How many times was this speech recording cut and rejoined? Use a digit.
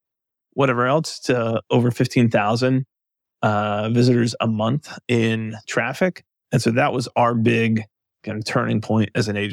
1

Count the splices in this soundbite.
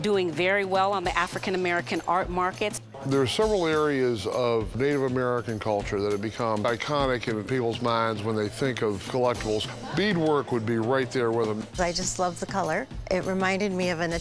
5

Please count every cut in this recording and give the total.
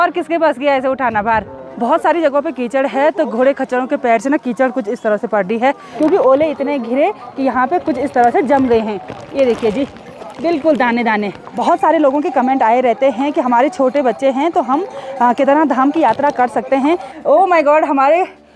4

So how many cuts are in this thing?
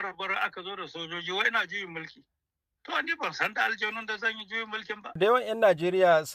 1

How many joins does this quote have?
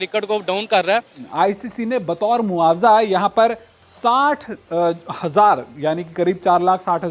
1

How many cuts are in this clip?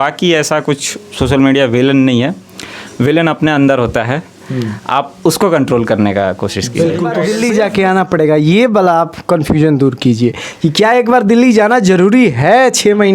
1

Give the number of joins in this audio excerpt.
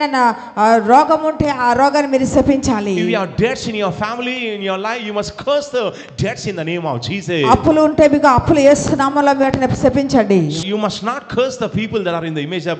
1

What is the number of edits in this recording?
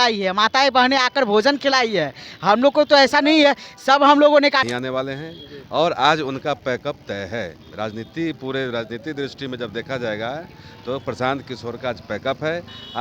1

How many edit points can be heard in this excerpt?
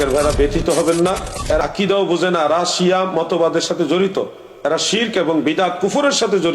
1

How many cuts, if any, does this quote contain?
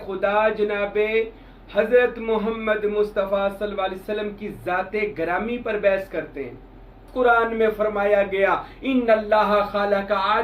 1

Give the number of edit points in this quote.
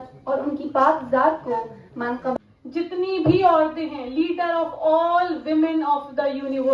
1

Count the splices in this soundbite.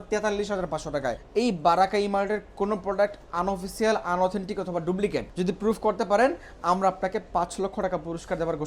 2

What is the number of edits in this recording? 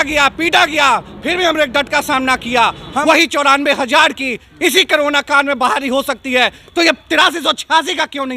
1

